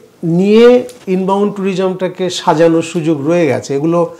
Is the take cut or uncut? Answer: uncut